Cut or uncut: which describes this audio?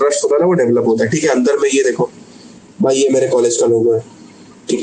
uncut